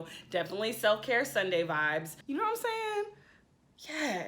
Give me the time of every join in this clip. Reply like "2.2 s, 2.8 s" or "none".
2.2 s